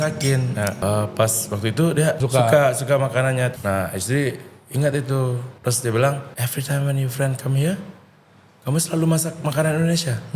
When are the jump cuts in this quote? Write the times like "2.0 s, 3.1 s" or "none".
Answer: 0.8 s, 2.2 s, 3.5 s, 5.5 s, 6.3 s